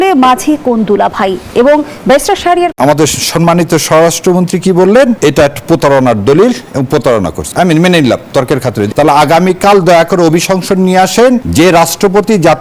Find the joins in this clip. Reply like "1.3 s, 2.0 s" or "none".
2.7 s, 5.2 s, 7.4 s, 8.9 s, 11.5 s